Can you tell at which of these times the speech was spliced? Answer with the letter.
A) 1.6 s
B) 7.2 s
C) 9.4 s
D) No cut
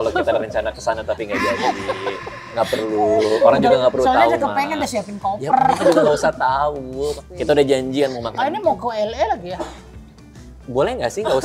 B